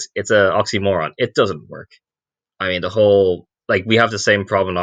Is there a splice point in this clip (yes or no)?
no